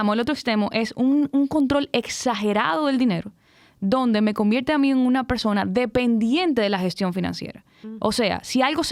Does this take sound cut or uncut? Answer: uncut